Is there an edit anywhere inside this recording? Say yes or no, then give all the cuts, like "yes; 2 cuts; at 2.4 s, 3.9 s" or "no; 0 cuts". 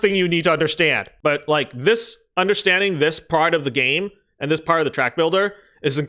yes; 1 cut; at 1.1 s